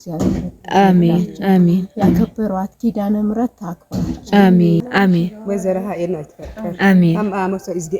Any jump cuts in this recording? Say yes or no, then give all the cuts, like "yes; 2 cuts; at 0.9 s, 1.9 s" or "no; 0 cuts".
yes; 1 cut; at 4.8 s